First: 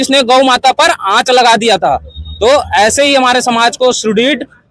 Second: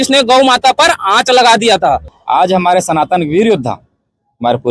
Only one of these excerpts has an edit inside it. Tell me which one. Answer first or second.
second